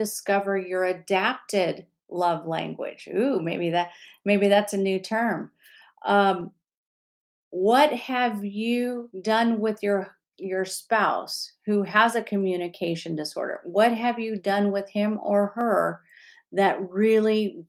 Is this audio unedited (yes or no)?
no